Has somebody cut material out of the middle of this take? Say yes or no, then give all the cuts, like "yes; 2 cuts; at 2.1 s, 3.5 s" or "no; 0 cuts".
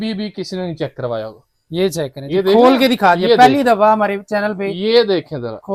no; 0 cuts